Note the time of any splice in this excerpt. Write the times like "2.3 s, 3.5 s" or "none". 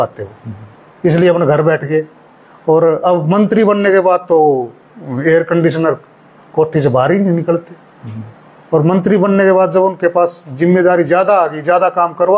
none